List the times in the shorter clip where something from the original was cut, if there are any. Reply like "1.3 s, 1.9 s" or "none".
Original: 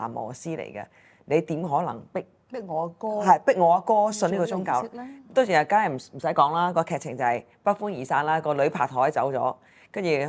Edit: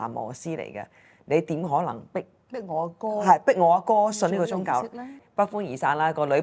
5.2 s